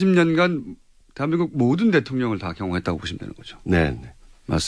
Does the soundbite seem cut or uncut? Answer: cut